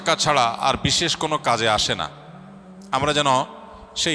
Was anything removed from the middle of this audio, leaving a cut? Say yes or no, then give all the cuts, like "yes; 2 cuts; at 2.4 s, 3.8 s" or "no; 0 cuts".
no; 0 cuts